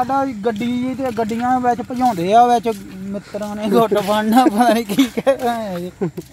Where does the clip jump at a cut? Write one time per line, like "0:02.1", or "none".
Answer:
none